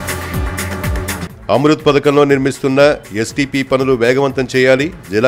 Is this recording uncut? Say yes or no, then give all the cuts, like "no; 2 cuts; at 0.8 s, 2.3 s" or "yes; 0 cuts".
no; 1 cut; at 1.2 s